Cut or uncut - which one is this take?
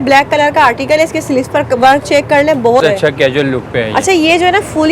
cut